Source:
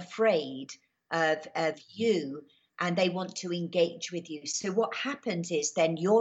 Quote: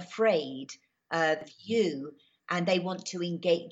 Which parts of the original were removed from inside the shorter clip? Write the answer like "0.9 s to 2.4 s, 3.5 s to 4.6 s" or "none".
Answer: 1.5 s to 1.8 s